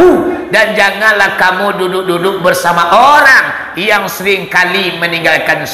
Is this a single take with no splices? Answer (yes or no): yes